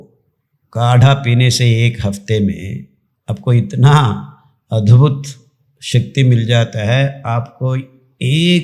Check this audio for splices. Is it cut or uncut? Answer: uncut